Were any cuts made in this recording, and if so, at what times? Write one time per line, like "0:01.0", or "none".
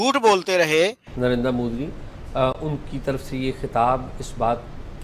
0:01.0